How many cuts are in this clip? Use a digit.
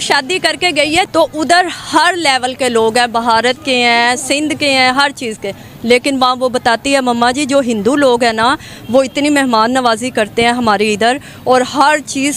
0